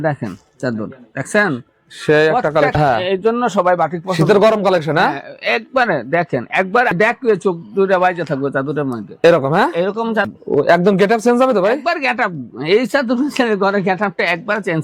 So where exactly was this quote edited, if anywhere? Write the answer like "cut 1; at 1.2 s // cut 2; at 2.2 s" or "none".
cut 1; at 2.7 s // cut 2; at 6.9 s // cut 3; at 10.3 s

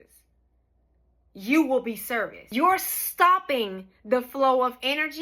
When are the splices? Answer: cut 1; at 2.4 s

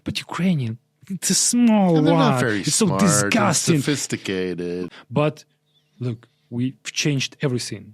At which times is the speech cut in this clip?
cut 1; at 4.9 s

